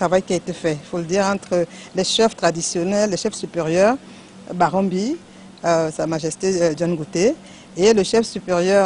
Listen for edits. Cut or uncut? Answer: uncut